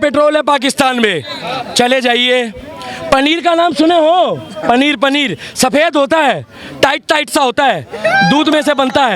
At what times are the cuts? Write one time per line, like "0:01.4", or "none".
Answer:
none